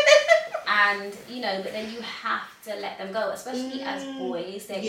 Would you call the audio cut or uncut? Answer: uncut